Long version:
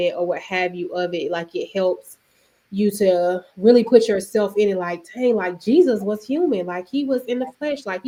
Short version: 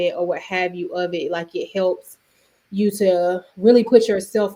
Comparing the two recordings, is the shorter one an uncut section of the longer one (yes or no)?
yes